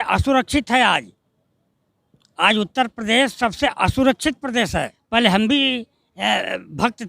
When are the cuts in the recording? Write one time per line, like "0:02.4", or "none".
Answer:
0:04.9